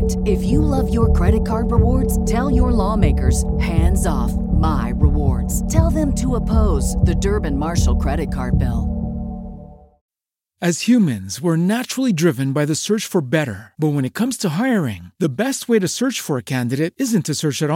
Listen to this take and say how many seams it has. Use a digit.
1